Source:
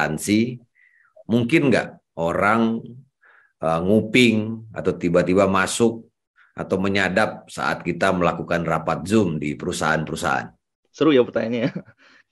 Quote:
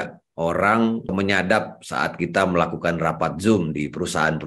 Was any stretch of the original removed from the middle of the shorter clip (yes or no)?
yes